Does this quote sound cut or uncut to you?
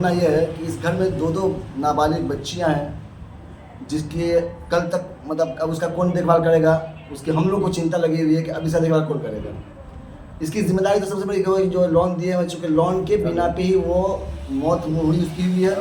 uncut